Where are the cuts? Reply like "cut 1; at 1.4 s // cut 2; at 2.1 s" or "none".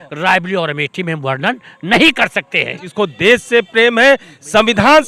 cut 1; at 2.8 s